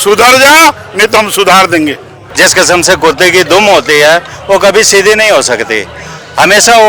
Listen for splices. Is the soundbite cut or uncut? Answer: cut